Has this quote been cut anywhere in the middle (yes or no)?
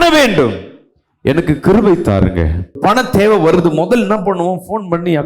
yes